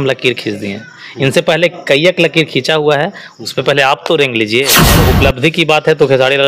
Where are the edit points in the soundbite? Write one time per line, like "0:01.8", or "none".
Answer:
0:05.0

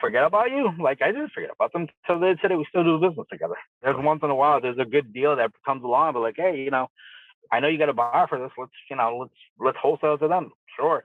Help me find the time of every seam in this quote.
0:03.9

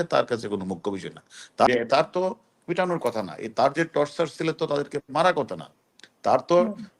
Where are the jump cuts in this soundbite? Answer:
0:01.7

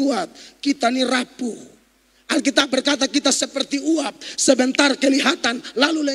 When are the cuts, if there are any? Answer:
none

